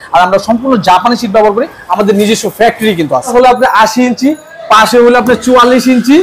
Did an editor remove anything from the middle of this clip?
yes; 1 cut; at 3.3 s

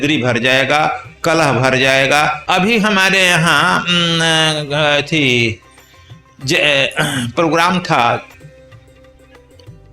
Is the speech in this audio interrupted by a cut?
yes; 1 cut; at 2.4 s

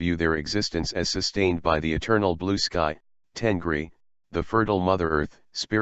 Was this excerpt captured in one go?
yes; 0 cuts

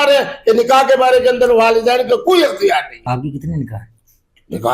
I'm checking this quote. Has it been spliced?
yes; 1 cut; at 3.0 s

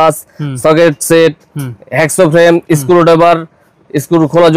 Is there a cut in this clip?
no; 0 cuts

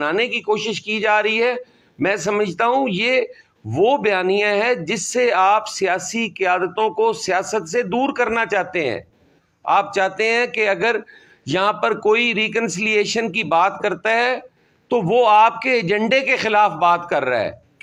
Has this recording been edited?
no; 0 cuts

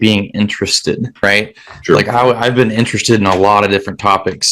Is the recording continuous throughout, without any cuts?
no; 1 cut; at 1.1 s

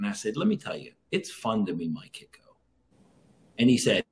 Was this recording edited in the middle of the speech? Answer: no; 0 cuts

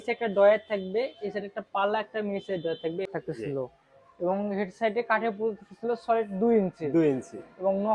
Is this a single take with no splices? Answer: no; 1 cut; at 3.1 s

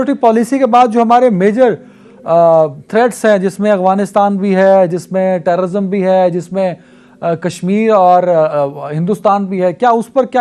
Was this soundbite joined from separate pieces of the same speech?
no; 0 cuts

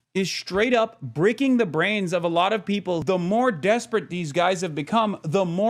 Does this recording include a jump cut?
yes; 1 cut; at 3.0 s

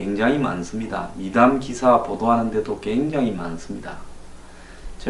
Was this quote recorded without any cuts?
yes; 0 cuts

